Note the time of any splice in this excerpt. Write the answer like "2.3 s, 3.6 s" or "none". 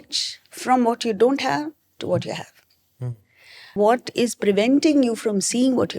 3.7 s